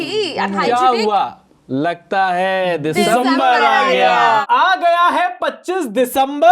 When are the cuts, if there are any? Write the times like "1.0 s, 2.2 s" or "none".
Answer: 4.4 s